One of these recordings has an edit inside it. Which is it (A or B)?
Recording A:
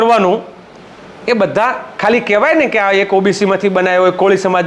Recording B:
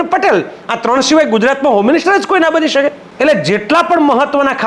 B